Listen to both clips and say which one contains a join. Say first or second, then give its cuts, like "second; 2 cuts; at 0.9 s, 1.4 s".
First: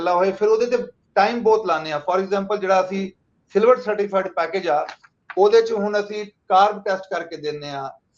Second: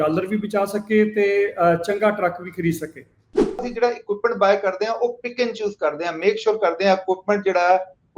second; 1 cut; at 3.6 s